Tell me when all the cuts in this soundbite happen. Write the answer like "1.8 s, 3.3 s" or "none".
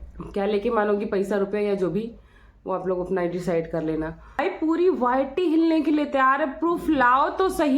4.4 s